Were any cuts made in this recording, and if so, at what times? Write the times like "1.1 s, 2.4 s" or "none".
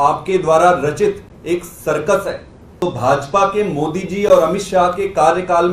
2.6 s